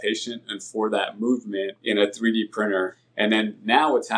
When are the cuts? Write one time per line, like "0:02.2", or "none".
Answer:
0:01.8
0:03.0